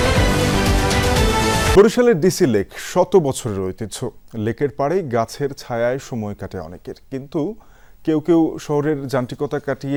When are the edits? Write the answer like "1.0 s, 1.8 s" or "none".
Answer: none